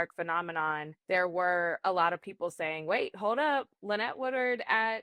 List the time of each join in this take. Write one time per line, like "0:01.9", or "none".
none